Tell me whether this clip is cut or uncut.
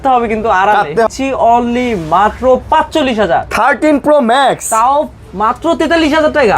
cut